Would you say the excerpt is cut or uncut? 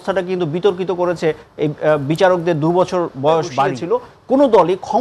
cut